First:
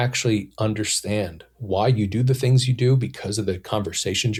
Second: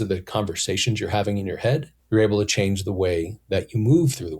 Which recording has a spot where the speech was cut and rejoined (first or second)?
second